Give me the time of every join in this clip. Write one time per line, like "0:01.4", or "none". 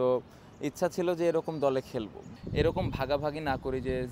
0:02.3